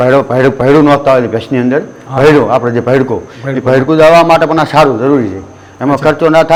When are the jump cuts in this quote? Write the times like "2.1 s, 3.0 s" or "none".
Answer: none